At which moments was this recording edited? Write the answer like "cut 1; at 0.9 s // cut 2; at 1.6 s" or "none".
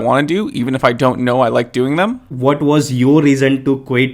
cut 1; at 2.3 s